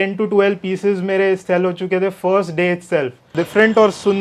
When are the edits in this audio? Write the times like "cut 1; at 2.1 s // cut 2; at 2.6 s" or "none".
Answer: cut 1; at 3.3 s